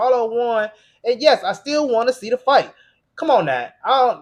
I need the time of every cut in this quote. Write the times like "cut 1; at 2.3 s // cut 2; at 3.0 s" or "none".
none